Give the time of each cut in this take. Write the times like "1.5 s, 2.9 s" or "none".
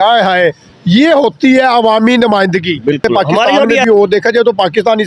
3.8 s